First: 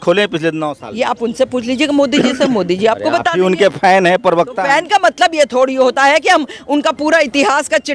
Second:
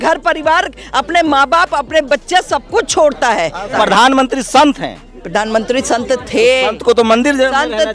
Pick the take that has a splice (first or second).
second